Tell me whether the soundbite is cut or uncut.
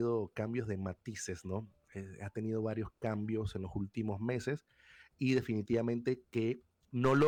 uncut